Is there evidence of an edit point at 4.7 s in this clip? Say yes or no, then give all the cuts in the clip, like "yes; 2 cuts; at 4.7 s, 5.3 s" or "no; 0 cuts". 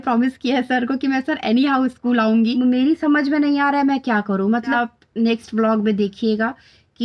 yes; 2 cuts; at 2.5 s, 4.7 s